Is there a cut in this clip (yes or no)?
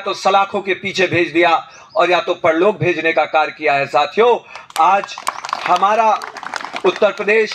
no